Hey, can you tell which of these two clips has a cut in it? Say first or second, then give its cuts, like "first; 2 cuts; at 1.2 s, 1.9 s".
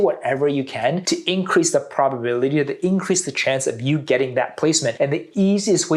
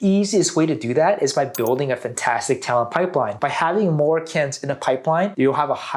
second; 1 cut; at 3.3 s